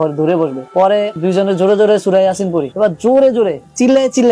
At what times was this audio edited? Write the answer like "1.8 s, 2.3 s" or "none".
1.1 s